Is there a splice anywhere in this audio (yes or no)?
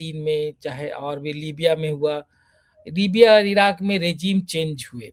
no